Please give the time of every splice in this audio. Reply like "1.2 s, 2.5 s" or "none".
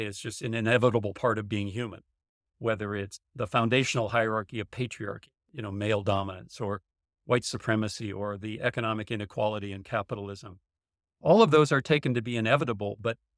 3.3 s